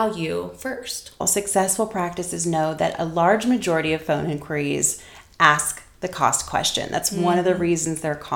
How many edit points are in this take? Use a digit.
1